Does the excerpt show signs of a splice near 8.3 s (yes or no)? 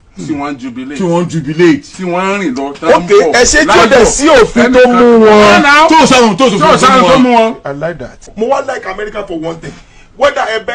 yes